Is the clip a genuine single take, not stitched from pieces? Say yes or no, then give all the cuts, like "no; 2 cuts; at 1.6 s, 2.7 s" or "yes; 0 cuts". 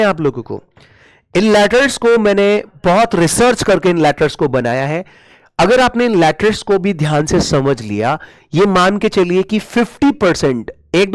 yes; 0 cuts